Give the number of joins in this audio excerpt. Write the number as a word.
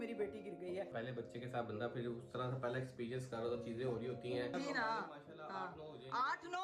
two